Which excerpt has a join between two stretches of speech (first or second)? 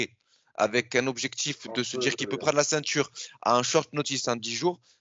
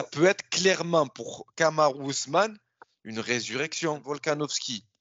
second